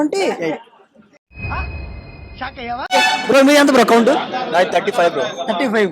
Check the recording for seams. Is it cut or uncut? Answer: cut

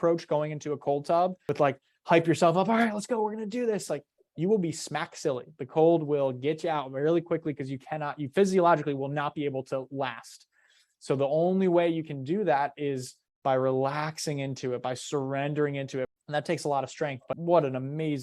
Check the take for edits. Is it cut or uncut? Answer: cut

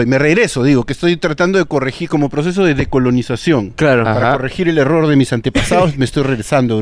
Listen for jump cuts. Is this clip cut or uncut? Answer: uncut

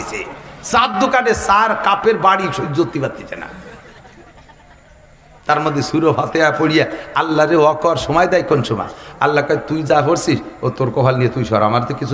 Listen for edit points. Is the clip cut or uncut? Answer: uncut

